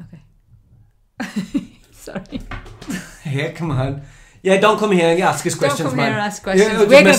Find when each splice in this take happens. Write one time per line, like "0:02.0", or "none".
none